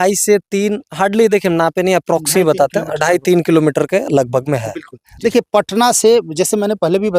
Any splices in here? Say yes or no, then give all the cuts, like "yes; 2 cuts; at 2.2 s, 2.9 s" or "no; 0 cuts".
no; 0 cuts